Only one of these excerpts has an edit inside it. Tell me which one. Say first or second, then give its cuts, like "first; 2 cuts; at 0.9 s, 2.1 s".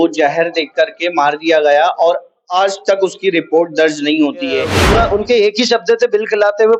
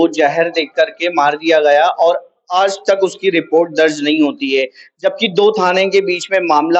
first; 1 cut; at 4.8 s